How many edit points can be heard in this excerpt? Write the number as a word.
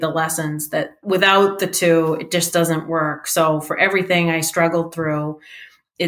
one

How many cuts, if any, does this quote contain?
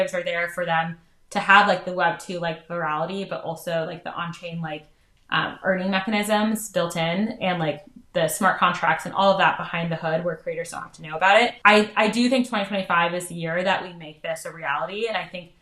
one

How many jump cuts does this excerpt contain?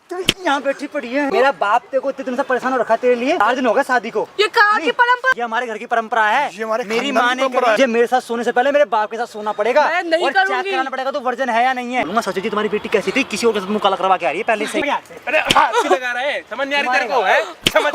six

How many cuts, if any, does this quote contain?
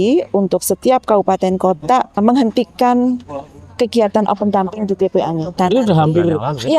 two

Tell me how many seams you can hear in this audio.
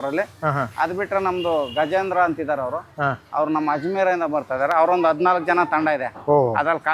zero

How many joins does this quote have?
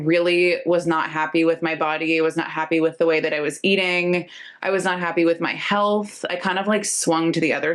zero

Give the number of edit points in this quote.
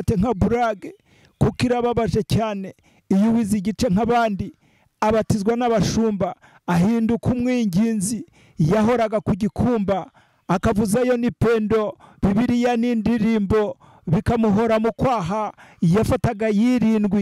zero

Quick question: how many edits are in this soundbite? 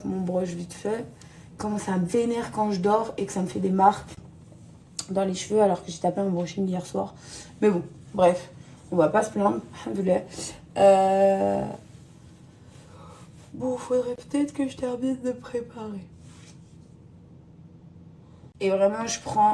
one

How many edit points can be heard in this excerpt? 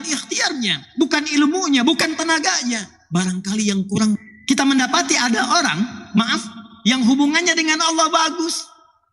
one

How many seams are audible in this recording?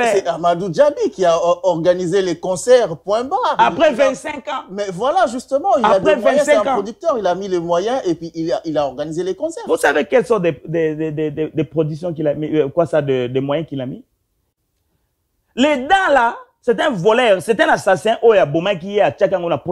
one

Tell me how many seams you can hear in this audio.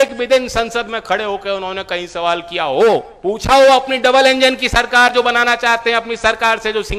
one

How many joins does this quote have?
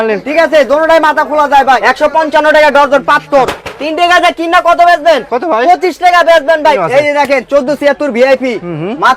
three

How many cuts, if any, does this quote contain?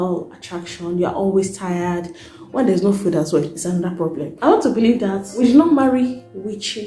three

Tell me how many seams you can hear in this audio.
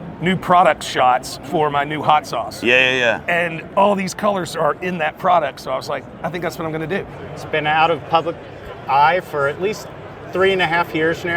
one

